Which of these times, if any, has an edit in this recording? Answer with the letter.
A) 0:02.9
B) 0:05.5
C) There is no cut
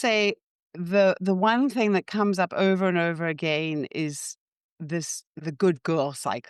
C